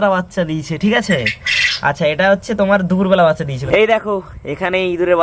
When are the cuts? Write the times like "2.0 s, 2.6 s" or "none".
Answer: 3.5 s